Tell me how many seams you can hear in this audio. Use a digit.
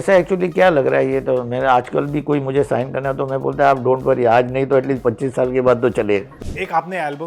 1